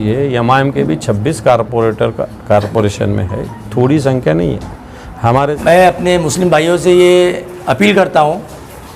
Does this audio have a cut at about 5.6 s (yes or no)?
yes